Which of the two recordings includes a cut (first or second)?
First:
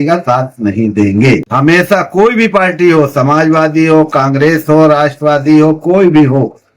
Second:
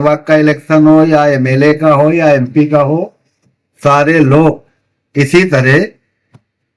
first